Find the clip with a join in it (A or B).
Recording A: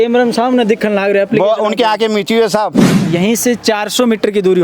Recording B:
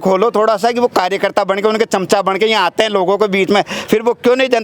A